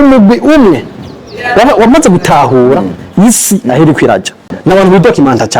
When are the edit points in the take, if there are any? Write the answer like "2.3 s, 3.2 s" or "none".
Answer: 4.5 s